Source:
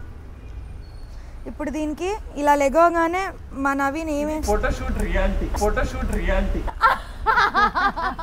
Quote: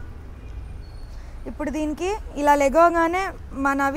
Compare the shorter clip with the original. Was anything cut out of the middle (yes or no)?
no